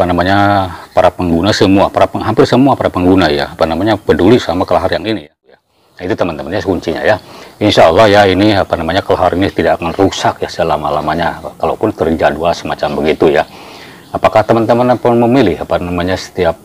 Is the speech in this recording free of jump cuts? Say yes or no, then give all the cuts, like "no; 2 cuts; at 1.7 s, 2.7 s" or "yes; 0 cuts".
no; 1 cut; at 5.7 s